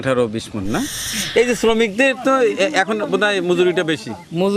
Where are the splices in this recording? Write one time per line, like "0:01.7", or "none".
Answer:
0:01.1